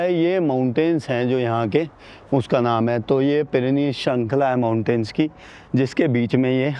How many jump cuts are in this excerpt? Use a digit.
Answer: 0